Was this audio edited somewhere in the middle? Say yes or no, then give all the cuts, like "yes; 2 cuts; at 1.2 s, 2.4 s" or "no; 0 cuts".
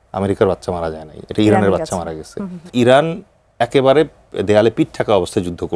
yes; 1 cut; at 2.6 s